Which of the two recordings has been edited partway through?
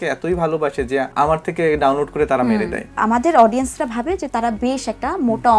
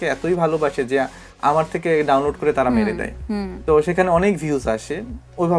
first; 2 cuts; at 1.1 s, 2.9 s

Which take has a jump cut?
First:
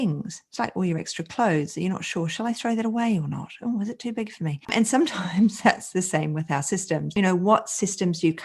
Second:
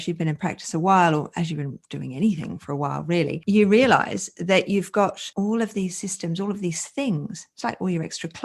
first; 2 cuts; at 4.7 s, 7.1 s

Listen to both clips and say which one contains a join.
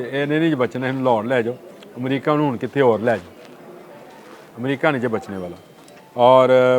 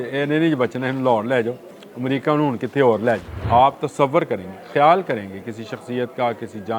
second; 1 cut; at 3.4 s

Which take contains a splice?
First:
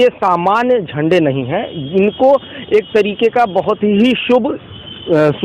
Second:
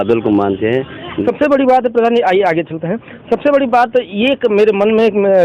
second; 1 cut; at 1.1 s

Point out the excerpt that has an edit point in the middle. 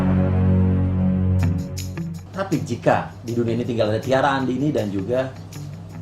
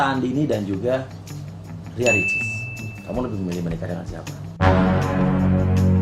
first; 1 cut; at 2.2 s

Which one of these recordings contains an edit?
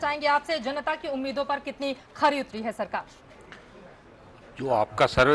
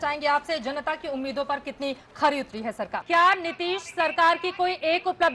second; 1 cut; at 3.0 s

